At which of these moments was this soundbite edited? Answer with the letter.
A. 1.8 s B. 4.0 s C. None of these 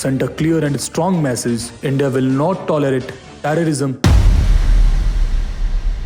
B